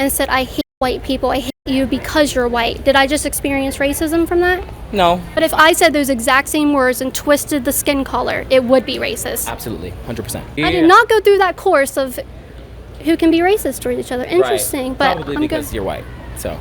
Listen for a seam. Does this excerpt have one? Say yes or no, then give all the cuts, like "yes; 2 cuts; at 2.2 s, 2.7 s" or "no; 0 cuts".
yes; 2 cuts; at 5.3 s, 10.5 s